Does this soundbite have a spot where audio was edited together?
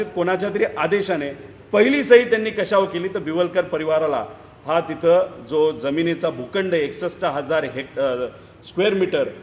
no; 0 cuts

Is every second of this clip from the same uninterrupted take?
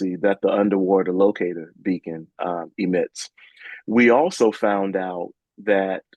yes; 0 cuts

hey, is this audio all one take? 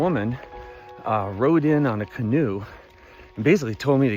yes; 0 cuts

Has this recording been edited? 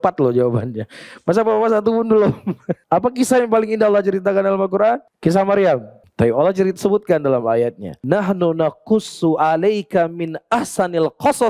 yes; 4 cuts; at 2.7 s, 5.1 s, 6.0 s, 7.9 s

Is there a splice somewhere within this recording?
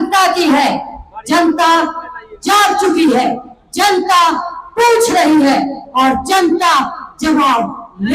no; 0 cuts

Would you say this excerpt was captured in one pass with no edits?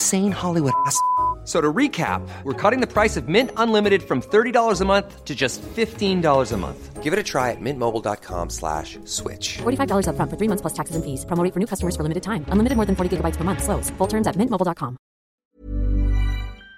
no; 1 cut; at 15.2 s

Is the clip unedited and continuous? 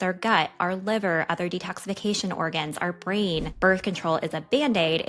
no; 1 cut; at 3.5 s

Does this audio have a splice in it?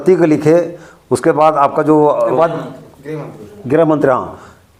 no; 0 cuts

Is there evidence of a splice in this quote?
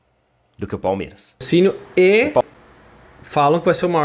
yes; 1 cut; at 1.4 s

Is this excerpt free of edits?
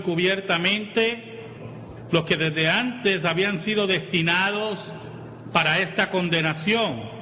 no; 1 cut; at 3.6 s

